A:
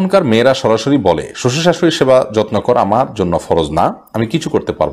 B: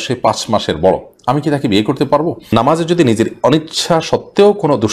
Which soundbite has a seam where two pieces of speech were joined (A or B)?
B